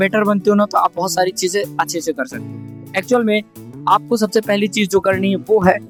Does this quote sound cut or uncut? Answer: uncut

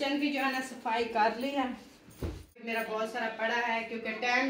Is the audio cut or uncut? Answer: cut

